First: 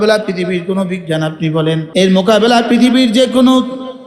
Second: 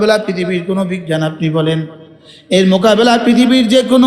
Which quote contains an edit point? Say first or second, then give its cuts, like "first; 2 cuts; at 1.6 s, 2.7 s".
first; 1 cut; at 1.8 s